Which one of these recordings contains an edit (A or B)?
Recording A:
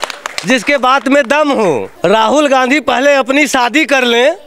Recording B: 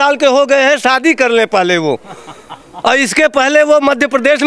A